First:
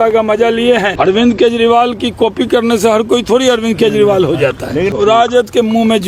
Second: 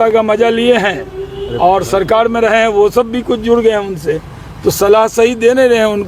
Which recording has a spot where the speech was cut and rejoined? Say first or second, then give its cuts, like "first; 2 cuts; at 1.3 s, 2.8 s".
first; 2 cuts; at 0.9 s, 4.9 s